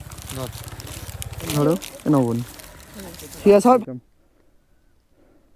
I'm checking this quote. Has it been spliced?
yes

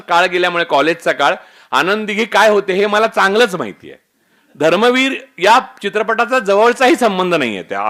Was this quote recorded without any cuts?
yes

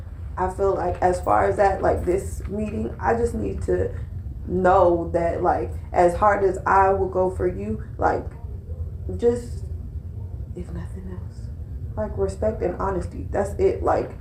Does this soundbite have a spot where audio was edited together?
no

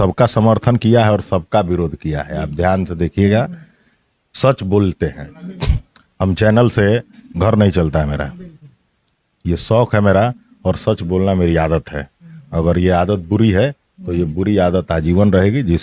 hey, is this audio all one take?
yes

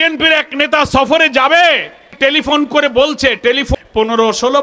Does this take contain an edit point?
yes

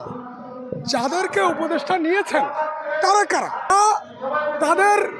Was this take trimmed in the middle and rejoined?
no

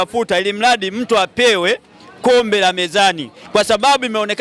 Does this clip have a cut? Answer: no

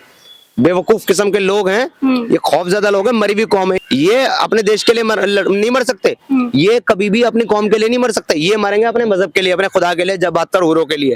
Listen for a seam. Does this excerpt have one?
no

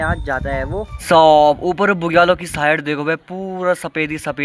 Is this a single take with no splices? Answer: no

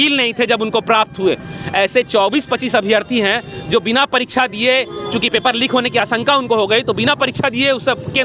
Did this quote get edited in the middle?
no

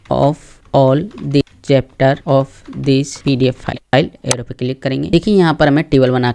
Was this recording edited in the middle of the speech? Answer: yes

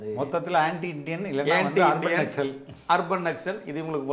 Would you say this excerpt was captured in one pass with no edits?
yes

